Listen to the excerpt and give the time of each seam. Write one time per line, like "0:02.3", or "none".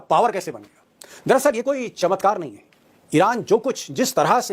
none